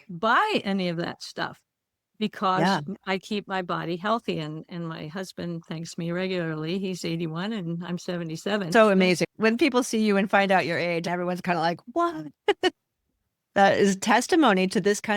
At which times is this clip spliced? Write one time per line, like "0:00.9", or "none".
0:08.7
0:11.0